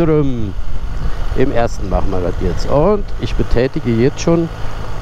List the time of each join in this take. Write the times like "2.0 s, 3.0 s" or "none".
none